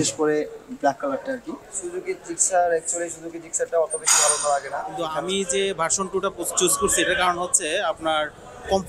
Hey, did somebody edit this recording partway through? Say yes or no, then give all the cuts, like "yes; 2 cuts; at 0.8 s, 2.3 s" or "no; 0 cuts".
no; 0 cuts